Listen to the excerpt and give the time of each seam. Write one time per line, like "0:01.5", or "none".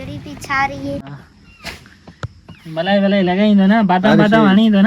0:01.1